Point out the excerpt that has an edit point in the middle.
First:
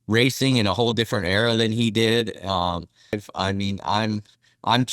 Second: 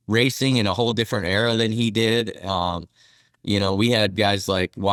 first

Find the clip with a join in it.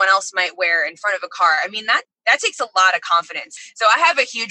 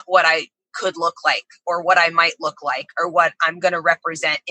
first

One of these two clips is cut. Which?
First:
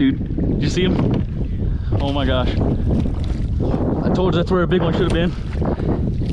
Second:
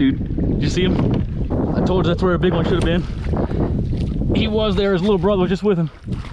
second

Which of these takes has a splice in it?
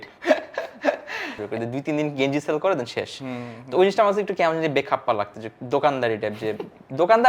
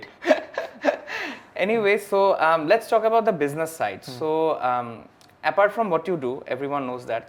first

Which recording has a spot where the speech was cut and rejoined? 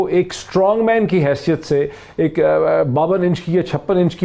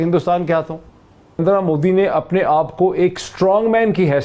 second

